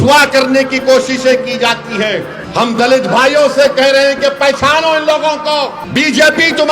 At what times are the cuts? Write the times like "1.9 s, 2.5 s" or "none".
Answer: 2.4 s, 5.8 s